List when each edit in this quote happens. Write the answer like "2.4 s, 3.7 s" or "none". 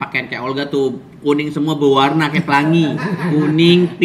none